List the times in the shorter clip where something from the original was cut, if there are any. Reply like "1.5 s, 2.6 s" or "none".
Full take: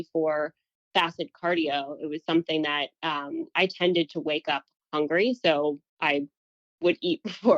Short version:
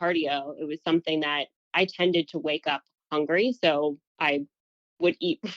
1.6 s